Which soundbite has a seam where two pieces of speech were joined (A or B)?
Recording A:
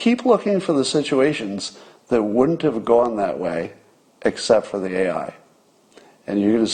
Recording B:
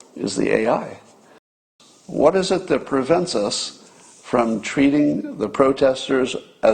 B